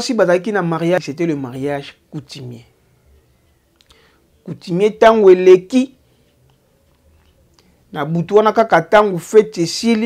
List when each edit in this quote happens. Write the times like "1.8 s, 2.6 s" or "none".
1.0 s